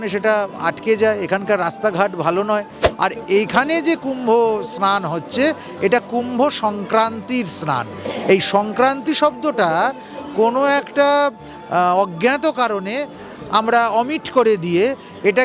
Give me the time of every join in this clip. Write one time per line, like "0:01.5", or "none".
0:02.8